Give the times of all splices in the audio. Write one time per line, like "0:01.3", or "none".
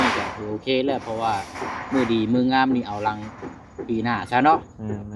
none